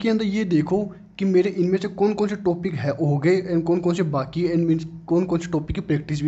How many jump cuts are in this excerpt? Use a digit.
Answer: 0